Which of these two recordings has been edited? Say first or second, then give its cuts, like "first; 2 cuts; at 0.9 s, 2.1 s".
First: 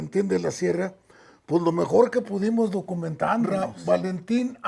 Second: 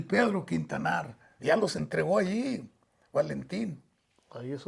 first; 1 cut; at 3.5 s